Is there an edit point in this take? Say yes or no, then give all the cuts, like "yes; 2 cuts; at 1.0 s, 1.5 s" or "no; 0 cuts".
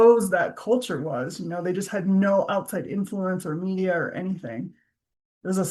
no; 0 cuts